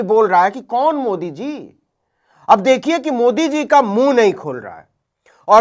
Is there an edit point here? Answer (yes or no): no